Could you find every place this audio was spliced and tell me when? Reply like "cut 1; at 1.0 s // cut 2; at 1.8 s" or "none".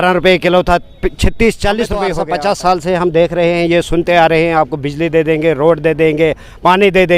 cut 1; at 2.2 s